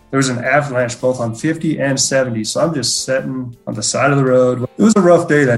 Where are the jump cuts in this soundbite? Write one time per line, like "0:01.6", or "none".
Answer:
0:03.6
0:04.7